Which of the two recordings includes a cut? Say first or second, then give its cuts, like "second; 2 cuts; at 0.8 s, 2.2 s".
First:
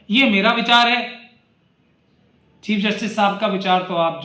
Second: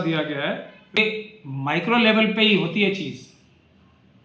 second; 1 cut; at 1.0 s